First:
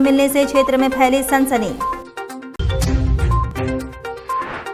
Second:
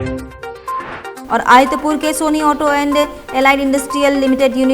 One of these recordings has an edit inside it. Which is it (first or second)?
second